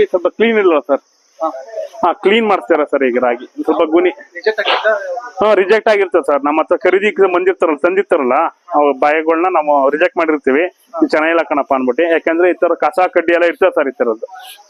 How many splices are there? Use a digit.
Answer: 0